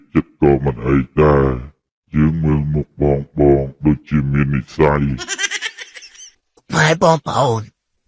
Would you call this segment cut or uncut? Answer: cut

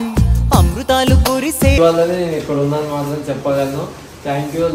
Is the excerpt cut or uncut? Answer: cut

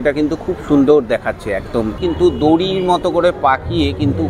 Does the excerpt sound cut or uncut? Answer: cut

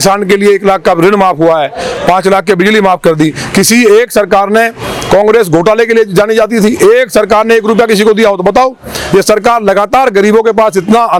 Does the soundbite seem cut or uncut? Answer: uncut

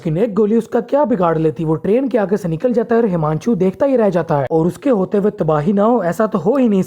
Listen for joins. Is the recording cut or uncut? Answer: cut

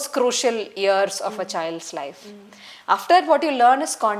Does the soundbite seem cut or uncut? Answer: uncut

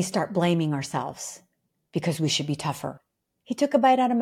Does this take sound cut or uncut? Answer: cut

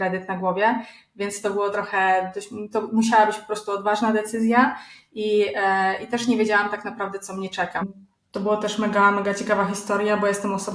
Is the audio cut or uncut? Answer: cut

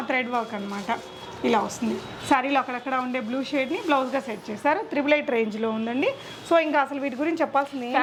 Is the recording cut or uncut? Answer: uncut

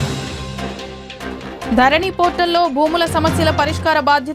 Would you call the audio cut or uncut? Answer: cut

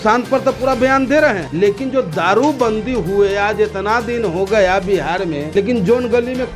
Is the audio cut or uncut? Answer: cut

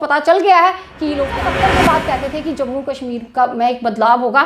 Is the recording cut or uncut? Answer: cut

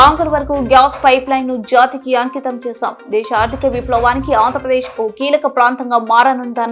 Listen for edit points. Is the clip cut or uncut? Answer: uncut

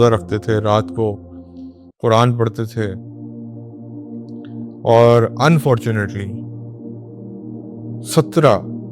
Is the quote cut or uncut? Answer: cut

